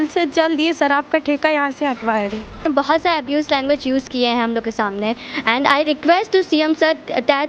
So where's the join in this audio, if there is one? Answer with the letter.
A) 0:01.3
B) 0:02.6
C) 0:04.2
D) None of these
B